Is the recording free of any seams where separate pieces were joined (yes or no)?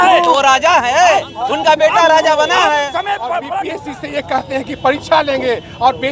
no